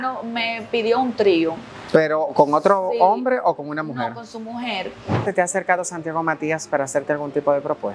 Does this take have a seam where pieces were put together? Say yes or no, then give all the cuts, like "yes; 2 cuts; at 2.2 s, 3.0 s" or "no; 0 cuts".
yes; 2 cuts; at 1.7 s, 5.2 s